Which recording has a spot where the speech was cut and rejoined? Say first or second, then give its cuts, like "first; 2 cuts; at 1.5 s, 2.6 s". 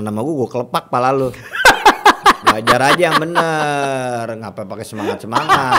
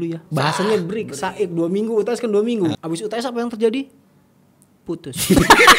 second; 1 cut; at 2.8 s